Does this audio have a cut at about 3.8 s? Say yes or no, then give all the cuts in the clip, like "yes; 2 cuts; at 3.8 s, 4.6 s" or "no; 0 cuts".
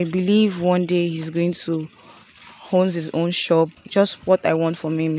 yes; 1 cut; at 3.8 s